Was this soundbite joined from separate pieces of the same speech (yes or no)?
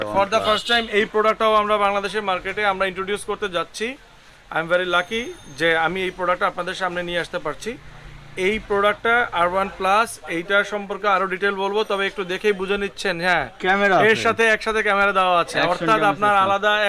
no